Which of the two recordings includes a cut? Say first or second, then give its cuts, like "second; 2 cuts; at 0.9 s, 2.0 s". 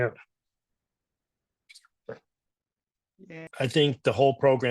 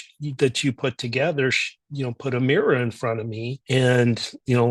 first; 1 cut; at 3.4 s